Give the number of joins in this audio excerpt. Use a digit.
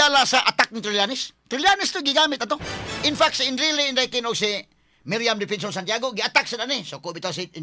0